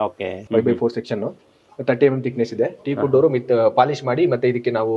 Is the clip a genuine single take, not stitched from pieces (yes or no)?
yes